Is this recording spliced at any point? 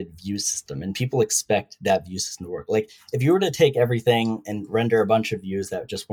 no; 0 cuts

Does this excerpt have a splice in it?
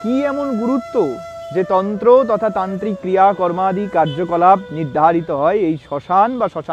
no; 0 cuts

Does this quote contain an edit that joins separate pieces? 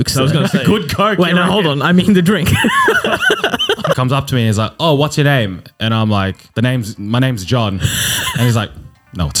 yes; 2 cuts; at 4.0 s, 6.4 s

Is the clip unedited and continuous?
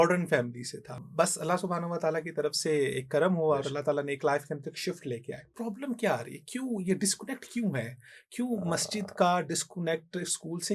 no; 2 cuts; at 1.0 s, 5.5 s

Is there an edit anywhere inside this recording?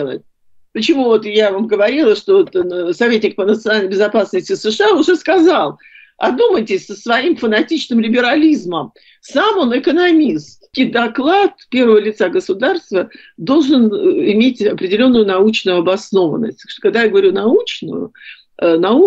yes; 1 cut; at 10.7 s

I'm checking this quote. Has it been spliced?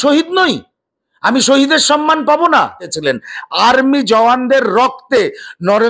yes; 1 cut; at 2.9 s

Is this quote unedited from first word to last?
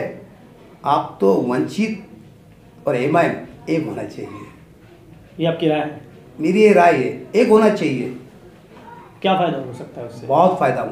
yes; 0 cuts

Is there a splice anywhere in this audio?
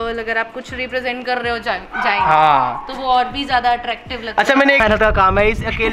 yes; 1 cut; at 4.8 s

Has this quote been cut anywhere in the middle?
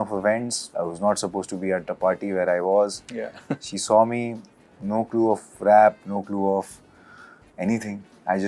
no; 0 cuts

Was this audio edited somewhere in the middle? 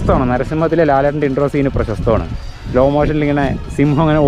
no; 0 cuts

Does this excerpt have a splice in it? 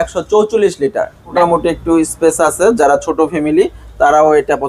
yes; 1 cut; at 1.3 s

